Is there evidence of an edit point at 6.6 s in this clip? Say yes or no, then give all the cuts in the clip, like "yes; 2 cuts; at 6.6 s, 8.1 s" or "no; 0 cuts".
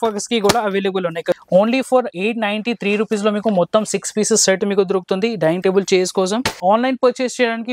yes; 2 cuts; at 1.4 s, 6.6 s